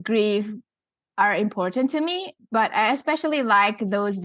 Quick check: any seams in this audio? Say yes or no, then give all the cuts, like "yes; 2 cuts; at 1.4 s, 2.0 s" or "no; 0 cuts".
no; 0 cuts